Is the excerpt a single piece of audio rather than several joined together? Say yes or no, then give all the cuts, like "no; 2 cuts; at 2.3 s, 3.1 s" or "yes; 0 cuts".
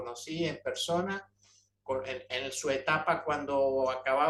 yes; 0 cuts